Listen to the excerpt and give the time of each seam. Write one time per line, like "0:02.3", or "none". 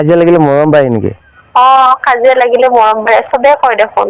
none